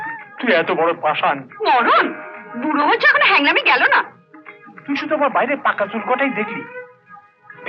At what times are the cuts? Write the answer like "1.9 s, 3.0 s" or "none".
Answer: none